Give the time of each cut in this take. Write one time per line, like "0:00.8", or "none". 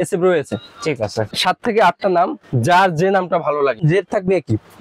0:01.3
0:03.8